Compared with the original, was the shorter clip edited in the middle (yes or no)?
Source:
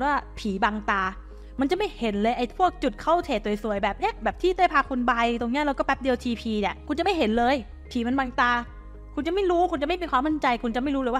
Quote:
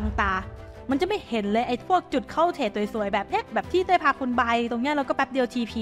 no